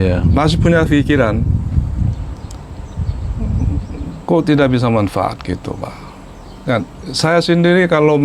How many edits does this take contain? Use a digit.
0